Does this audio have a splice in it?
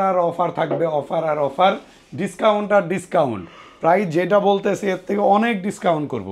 no; 0 cuts

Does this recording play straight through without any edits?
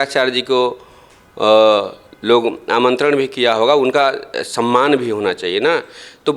yes; 0 cuts

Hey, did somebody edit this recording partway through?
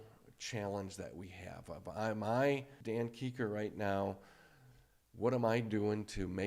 yes; 1 cut; at 2.7 s

